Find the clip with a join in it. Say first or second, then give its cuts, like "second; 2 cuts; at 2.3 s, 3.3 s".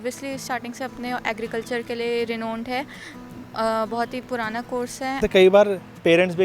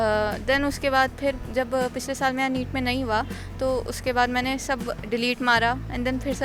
first; 1 cut; at 5.2 s